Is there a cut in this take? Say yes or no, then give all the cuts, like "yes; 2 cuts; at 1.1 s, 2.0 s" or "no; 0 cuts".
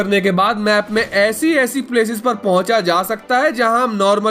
no; 0 cuts